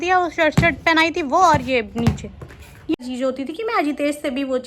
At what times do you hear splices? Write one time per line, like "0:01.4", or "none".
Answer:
0:03.0